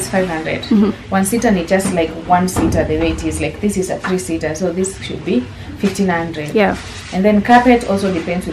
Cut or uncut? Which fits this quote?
uncut